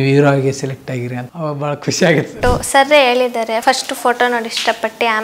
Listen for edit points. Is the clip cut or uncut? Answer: cut